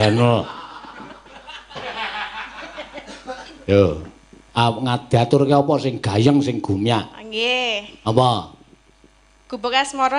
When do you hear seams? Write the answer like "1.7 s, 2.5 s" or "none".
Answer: none